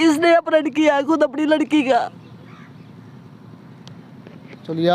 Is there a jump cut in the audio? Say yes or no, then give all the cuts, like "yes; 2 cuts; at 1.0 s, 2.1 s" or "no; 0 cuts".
no; 0 cuts